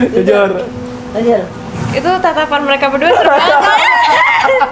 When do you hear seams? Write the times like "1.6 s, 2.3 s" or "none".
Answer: none